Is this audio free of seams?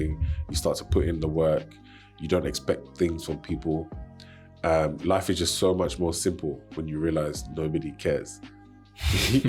yes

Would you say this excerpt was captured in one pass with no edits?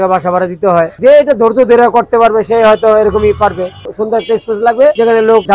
no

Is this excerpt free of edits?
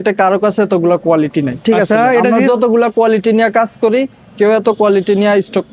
yes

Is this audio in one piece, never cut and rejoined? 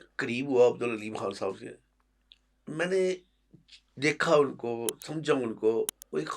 yes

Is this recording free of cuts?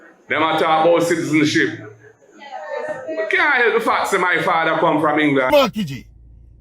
no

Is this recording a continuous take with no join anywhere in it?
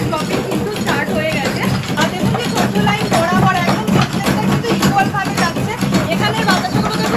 yes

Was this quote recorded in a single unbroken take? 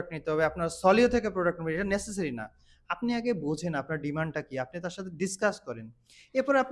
yes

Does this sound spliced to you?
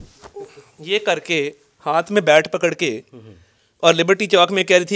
no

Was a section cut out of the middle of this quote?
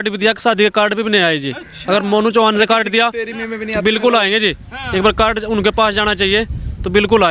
no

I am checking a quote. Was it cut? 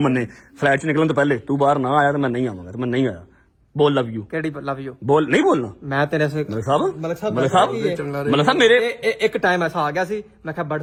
no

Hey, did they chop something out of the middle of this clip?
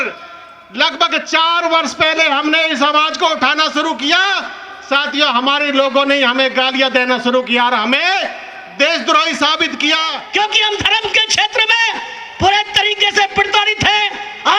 yes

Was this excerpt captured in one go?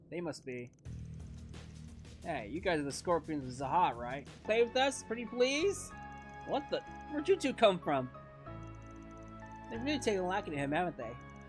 no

